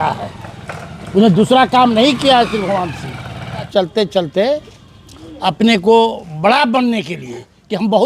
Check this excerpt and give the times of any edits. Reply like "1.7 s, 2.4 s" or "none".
3.7 s